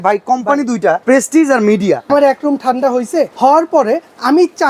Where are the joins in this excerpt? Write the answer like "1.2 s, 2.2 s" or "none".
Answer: 1.0 s, 2.1 s, 3.3 s